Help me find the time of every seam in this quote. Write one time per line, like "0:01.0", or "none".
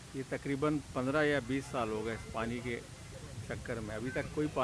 none

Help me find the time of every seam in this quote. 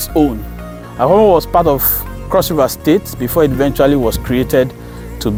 none

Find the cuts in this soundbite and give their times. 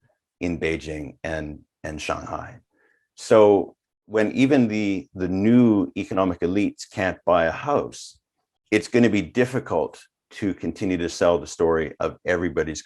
none

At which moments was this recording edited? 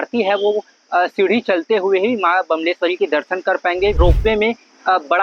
0:04.0

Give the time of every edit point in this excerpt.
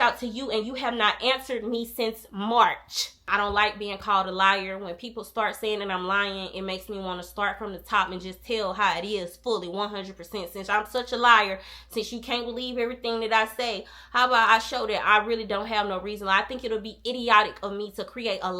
0:03.2

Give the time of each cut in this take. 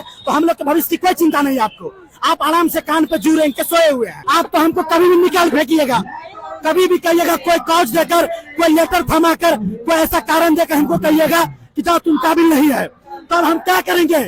0:04.2

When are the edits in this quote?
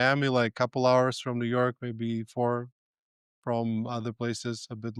none

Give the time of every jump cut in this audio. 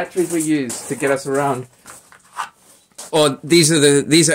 none

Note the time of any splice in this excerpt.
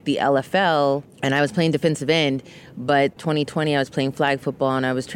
0:01.1
0:03.2

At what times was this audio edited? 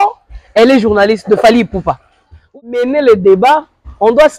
0:02.5

